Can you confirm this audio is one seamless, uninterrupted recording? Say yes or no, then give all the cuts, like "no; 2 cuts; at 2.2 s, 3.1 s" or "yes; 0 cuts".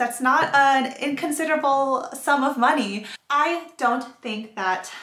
no; 1 cut; at 3.2 s